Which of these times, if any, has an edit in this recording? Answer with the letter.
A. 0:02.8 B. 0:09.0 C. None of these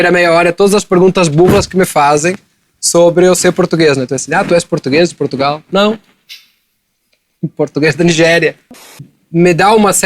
B